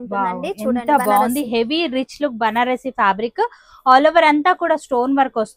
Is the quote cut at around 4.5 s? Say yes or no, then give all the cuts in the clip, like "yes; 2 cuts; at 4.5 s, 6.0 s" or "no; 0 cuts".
no; 0 cuts